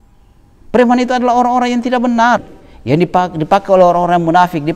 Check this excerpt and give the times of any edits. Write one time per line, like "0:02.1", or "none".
0:02.6